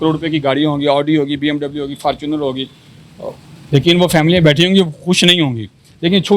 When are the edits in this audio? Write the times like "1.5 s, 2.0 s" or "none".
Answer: none